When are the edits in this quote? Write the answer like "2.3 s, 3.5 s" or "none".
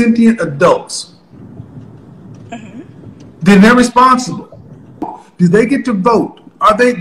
5.2 s